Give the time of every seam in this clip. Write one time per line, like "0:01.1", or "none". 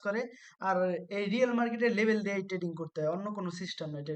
none